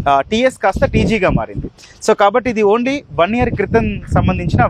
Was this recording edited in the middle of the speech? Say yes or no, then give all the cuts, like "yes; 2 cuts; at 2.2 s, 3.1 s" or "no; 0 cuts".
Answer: no; 0 cuts